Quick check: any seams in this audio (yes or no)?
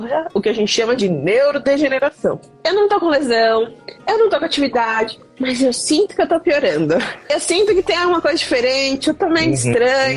yes